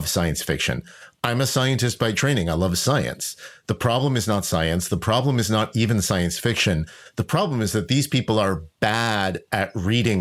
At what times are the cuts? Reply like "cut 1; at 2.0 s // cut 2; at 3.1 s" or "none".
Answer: none